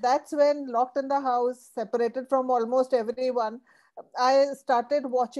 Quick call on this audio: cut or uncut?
uncut